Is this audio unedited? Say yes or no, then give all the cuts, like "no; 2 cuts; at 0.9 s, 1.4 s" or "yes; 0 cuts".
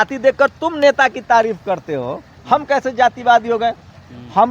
yes; 0 cuts